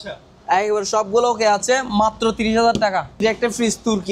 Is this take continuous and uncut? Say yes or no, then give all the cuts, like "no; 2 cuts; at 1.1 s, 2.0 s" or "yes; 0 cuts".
no; 1 cut; at 3.2 s